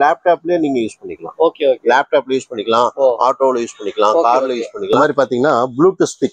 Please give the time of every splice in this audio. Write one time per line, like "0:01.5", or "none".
0:05.0